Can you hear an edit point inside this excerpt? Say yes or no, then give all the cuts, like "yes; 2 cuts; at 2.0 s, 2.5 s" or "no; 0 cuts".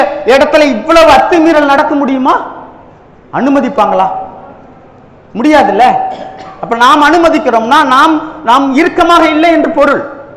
no; 0 cuts